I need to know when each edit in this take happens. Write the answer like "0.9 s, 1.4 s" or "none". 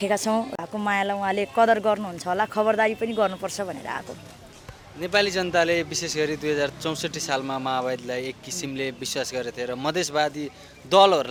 none